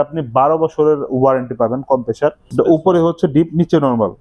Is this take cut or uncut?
cut